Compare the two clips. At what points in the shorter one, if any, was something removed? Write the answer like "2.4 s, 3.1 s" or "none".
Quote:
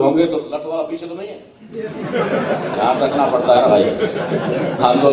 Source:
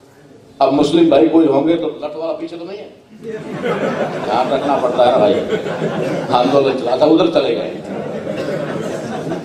none